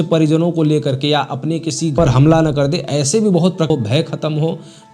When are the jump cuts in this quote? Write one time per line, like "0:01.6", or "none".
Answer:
0:02.0
0:03.7